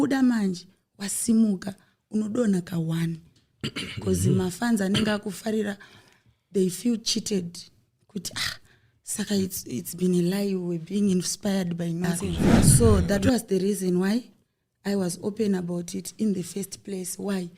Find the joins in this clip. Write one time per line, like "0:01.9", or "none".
0:12.5